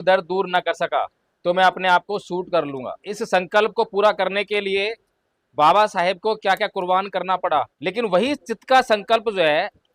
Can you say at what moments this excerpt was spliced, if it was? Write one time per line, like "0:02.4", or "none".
0:01.2
0:03.1
0:07.7